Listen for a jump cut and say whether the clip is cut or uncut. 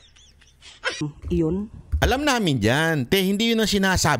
cut